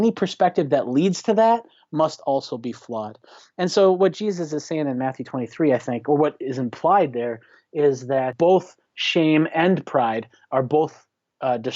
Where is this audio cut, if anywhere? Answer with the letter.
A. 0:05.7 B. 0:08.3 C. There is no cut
B